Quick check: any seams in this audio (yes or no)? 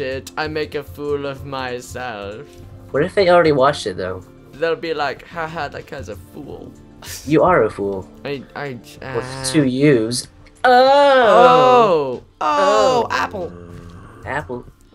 no